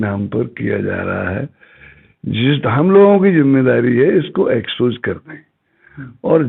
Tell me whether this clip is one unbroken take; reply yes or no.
yes